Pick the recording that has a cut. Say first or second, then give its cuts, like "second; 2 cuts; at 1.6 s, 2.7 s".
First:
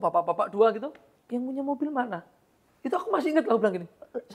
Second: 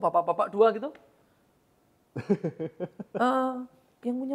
first; 1 cut; at 1.1 s